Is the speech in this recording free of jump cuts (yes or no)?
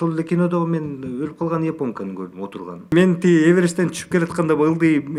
yes